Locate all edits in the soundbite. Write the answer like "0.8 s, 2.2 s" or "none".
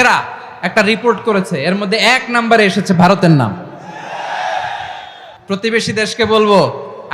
none

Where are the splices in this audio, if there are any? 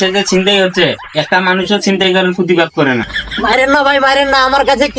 3.2 s

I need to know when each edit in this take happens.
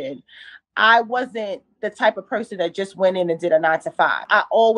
none

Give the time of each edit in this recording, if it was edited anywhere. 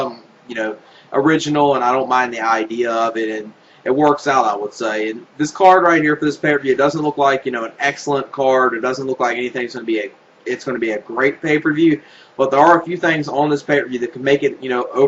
6.4 s

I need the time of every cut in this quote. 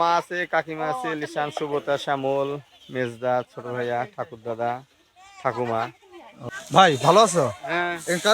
6.5 s

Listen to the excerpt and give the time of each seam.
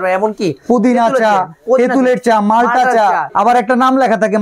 3.3 s

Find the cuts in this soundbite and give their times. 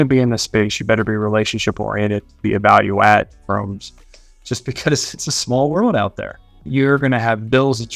6.6 s

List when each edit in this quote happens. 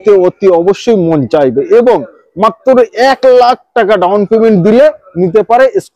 none

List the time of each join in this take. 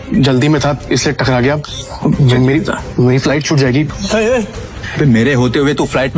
3.9 s, 4.8 s

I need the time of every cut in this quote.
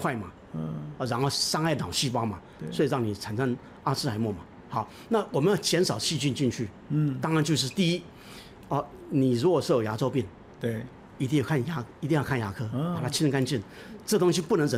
none

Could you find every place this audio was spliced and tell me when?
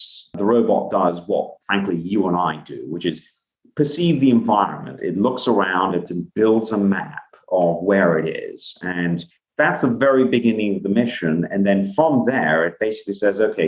6.1 s, 9.3 s

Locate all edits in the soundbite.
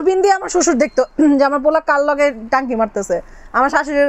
none

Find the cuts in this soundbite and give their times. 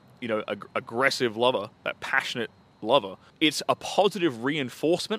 3.2 s

